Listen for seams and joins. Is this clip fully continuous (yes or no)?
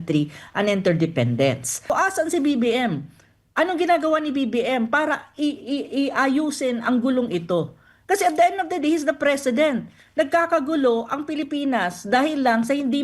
no